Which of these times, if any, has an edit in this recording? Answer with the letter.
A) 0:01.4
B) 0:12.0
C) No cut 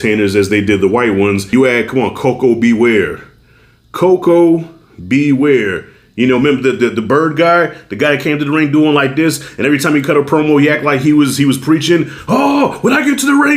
A